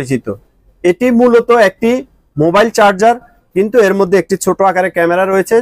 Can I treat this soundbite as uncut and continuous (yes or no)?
yes